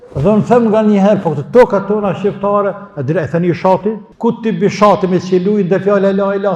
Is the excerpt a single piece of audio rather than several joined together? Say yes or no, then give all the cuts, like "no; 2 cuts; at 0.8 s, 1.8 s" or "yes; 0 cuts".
no; 1 cut; at 4.1 s